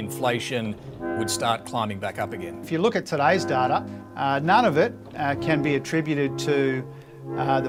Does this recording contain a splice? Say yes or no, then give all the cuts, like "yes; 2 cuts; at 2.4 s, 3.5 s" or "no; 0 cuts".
no; 0 cuts